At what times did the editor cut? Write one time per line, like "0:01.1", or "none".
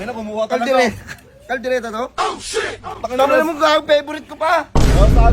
none